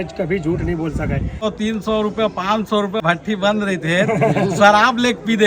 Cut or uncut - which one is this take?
cut